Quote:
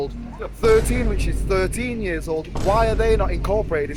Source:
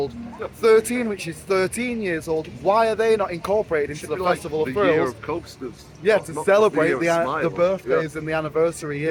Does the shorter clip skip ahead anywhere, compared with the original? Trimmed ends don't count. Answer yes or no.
no